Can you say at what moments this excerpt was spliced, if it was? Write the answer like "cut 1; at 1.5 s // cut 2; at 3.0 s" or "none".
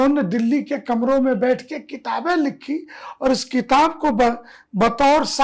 none